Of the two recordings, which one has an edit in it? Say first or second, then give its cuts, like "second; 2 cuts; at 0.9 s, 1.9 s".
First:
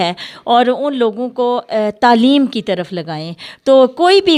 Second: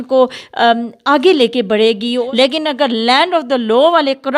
second; 1 cut; at 2.2 s